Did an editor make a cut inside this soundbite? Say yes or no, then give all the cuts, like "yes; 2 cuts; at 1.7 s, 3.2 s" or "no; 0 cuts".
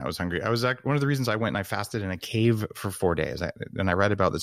no; 0 cuts